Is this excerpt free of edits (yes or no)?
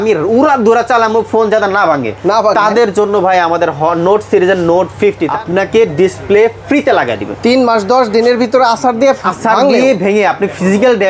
no